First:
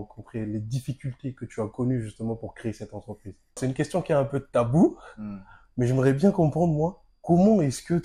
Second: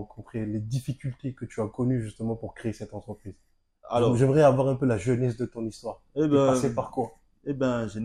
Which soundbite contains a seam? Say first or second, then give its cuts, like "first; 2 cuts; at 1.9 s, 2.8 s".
first; 1 cut; at 3.6 s